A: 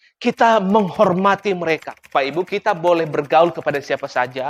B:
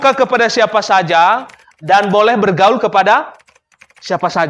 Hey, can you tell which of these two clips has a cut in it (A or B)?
A